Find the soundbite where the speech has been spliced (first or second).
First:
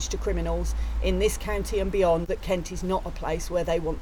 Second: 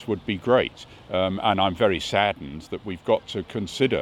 first